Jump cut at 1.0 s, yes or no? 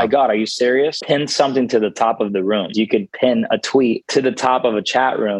yes